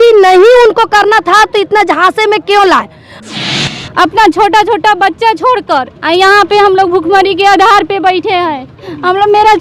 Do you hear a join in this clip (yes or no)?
yes